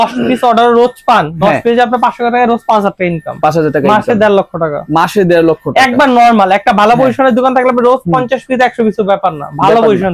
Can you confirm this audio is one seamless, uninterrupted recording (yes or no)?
yes